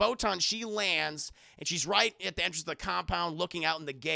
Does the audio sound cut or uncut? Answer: uncut